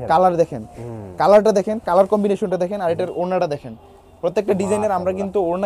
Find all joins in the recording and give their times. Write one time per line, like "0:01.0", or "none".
none